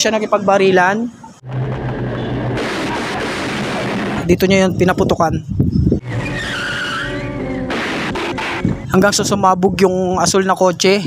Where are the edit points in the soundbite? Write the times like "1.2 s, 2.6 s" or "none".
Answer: 4.2 s